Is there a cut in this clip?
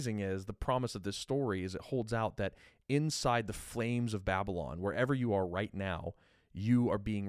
no; 0 cuts

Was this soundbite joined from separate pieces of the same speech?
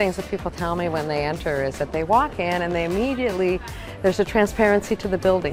no; 0 cuts

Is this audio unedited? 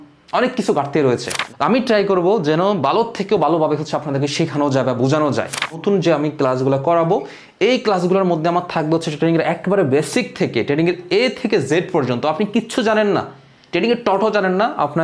no; 2 cuts; at 1.3 s, 5.8 s

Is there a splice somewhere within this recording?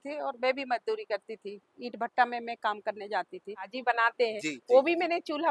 yes; 1 cut; at 3.8 s

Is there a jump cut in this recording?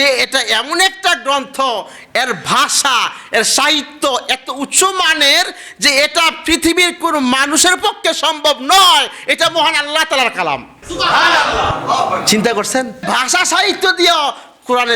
yes; 1 cut; at 13.0 s

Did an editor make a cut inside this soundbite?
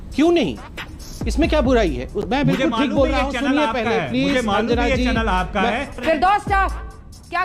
yes; 2 cuts; at 2.1 s, 5.8 s

